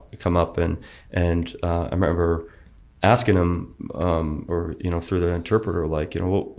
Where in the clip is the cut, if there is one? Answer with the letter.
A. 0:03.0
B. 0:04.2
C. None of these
C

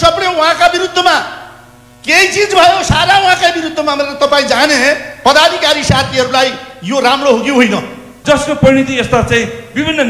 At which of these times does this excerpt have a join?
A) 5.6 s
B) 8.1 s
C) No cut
B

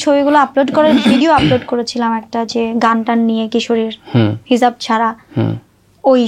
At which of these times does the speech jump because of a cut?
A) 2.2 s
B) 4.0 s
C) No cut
C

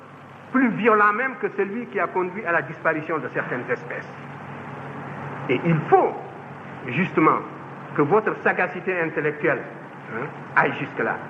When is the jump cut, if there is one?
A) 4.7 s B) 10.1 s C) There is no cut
C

